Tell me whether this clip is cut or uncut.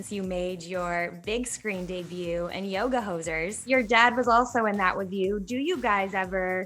cut